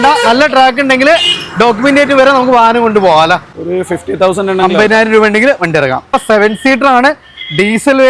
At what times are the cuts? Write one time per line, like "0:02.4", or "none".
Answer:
0:03.5
0:06.2